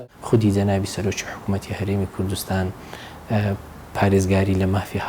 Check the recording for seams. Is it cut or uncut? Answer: uncut